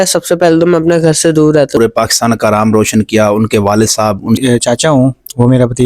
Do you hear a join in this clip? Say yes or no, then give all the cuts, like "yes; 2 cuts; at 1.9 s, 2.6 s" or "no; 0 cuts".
yes; 2 cuts; at 1.8 s, 4.4 s